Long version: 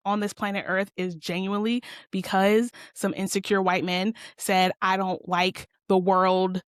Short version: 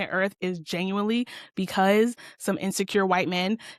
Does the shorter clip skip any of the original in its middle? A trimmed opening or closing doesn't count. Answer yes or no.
no